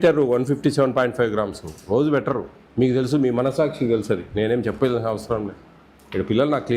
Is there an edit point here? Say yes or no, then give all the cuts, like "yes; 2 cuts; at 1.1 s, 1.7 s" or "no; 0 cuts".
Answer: yes; 1 cut; at 2.6 s